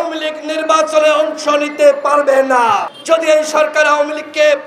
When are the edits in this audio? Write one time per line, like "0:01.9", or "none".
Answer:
0:02.9